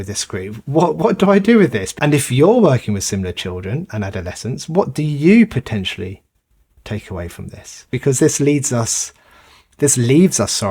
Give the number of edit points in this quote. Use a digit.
2